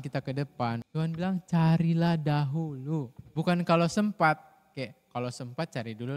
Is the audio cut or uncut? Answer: cut